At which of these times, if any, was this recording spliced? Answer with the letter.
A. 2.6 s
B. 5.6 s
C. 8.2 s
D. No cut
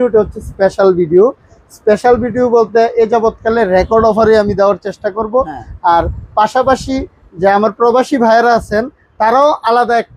D